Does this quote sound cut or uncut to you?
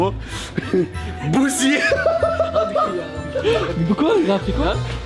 uncut